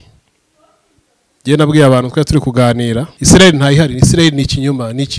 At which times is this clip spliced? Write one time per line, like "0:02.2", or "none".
0:03.1